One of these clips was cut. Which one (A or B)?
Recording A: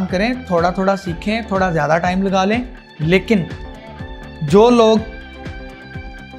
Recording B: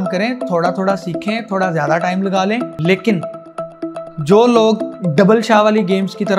B